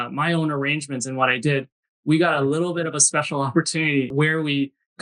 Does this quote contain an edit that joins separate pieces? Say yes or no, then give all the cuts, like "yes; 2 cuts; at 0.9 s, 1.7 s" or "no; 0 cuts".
yes; 1 cut; at 4.1 s